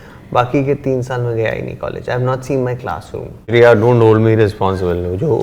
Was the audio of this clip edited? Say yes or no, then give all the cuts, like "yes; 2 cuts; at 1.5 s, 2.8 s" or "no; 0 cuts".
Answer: yes; 1 cut; at 3.5 s